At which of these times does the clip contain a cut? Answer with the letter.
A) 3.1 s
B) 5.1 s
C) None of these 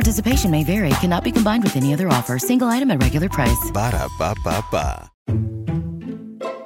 B